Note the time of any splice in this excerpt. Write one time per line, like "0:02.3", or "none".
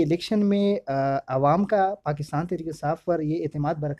none